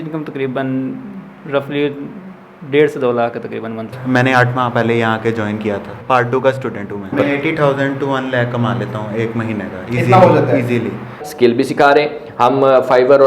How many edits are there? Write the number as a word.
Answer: four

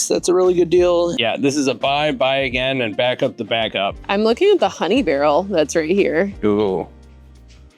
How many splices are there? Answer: two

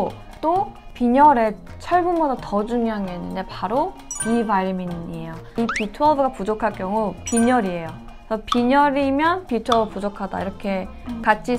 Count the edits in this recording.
one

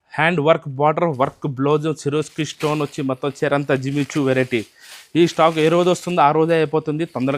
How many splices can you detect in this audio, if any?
zero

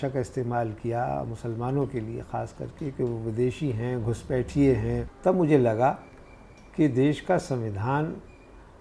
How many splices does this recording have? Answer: one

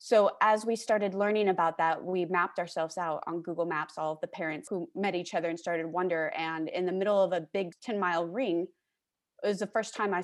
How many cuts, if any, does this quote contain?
one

